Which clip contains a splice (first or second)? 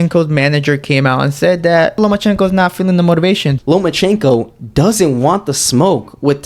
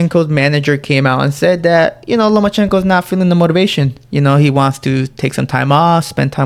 first